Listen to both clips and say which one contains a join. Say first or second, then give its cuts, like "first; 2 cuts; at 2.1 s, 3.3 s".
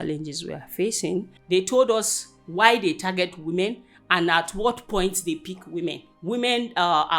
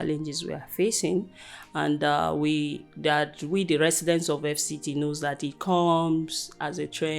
first; 2 cuts; at 1.3 s, 6.1 s